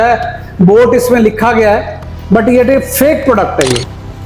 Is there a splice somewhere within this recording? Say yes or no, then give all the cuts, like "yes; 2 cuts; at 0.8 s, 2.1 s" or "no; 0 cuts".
no; 0 cuts